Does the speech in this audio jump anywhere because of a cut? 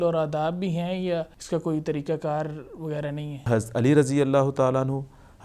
yes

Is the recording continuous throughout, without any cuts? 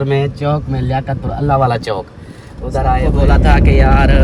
no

